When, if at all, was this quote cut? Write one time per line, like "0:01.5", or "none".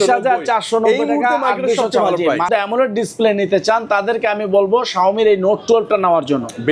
0:02.5